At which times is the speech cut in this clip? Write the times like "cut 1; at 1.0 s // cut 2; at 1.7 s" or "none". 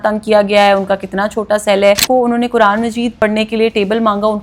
cut 1; at 2.0 s // cut 2; at 3.1 s